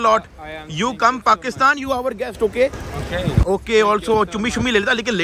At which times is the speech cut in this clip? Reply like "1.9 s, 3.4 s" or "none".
none